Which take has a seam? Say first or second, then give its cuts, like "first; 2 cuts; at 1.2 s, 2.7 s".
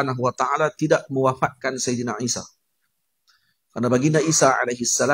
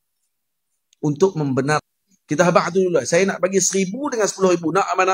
second; 1 cut; at 1.8 s